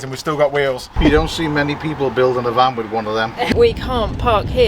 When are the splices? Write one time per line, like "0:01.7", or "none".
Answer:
0:00.9
0:03.5